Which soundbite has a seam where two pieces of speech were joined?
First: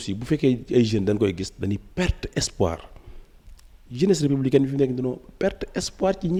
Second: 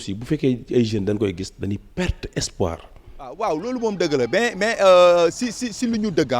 second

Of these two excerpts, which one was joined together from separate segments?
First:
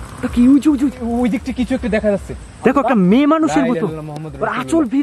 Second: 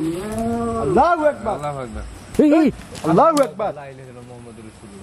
second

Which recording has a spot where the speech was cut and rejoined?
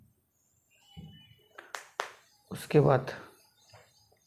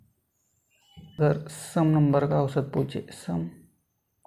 second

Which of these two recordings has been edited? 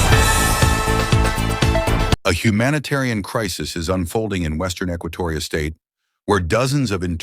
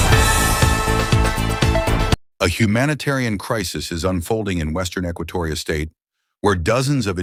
first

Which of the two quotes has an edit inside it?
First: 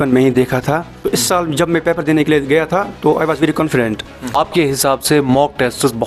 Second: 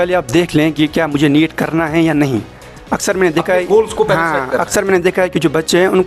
first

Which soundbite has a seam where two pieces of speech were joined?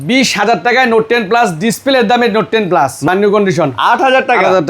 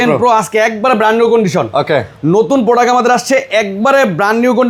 first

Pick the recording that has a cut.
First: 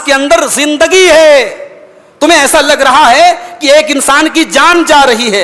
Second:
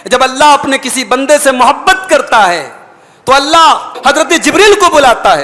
second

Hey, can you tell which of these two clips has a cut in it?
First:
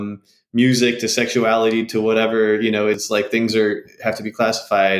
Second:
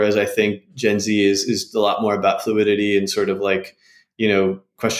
first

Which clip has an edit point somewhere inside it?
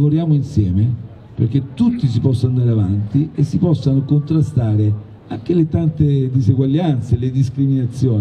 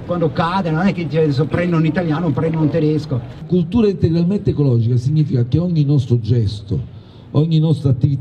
second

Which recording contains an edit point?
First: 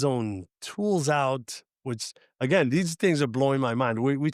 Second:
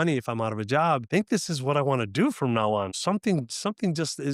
second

